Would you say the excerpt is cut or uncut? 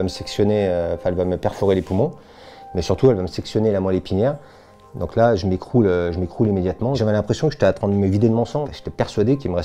cut